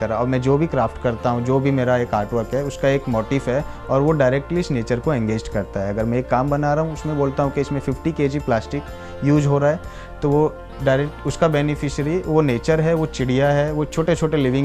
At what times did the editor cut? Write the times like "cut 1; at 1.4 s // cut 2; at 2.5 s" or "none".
none